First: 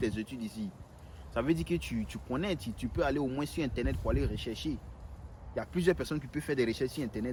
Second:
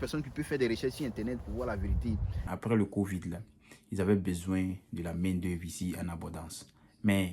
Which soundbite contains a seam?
second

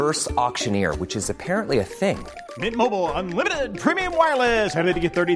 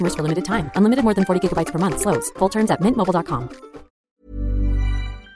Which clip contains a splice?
second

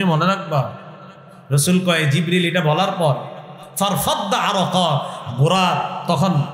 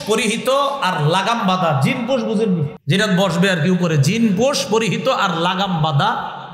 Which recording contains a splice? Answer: second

